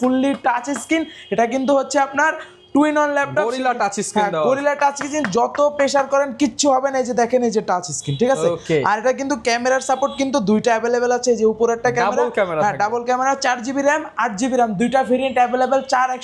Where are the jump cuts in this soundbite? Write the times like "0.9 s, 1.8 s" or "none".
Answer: none